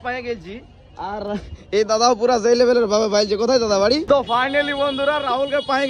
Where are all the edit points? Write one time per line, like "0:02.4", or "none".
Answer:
0:04.0